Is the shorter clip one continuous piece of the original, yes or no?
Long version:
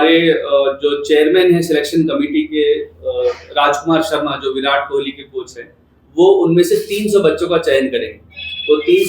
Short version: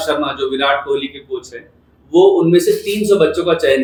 yes